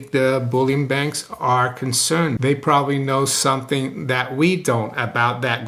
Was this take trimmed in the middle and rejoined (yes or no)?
yes